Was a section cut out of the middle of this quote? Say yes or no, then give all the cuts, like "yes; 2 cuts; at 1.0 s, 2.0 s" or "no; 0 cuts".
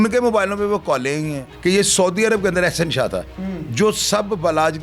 yes; 1 cut; at 1.5 s